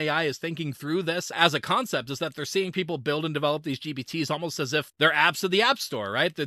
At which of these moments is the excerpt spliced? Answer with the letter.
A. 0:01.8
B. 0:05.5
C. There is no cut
C